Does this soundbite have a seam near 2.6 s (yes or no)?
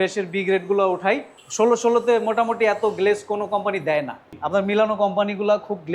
no